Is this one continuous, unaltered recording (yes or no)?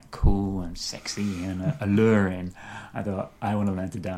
yes